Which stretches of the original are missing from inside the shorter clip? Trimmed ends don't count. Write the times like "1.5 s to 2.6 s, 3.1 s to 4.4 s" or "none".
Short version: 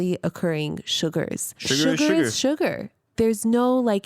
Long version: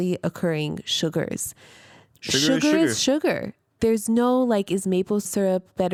1.5 s to 2.1 s